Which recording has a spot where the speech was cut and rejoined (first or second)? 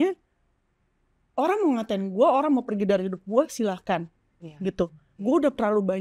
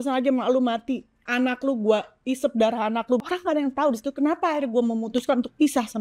second